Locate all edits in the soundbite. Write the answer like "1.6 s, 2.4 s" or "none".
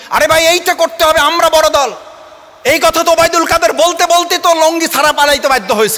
none